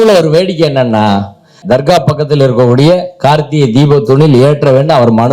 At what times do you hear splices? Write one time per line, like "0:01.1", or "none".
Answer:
0:01.6